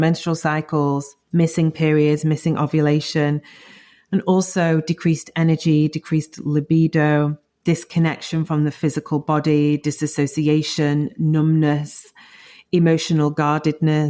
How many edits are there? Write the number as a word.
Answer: two